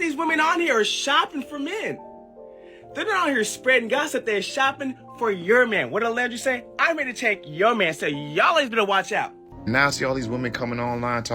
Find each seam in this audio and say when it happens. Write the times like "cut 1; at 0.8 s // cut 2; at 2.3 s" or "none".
cut 1; at 9.4 s